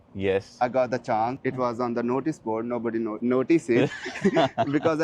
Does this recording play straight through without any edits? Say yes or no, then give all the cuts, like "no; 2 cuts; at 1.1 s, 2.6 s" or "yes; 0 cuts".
yes; 0 cuts